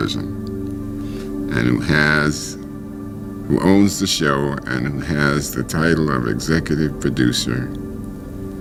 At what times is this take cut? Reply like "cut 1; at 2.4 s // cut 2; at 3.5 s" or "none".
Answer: none